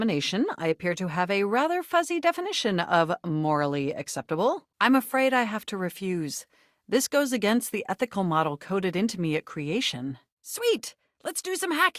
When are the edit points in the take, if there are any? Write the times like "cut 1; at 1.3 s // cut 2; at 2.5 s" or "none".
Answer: cut 1; at 4.7 s // cut 2; at 10.4 s